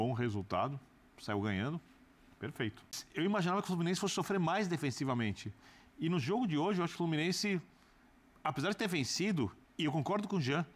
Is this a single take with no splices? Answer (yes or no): no